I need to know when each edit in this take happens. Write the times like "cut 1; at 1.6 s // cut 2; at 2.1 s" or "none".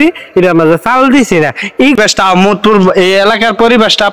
cut 1; at 2.0 s